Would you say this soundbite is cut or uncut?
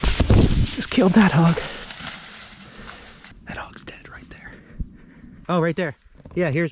cut